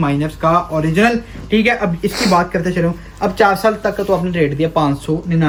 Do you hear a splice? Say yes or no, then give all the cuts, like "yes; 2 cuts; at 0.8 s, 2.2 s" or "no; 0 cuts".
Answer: no; 0 cuts